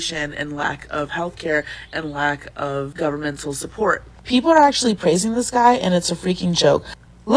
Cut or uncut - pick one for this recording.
uncut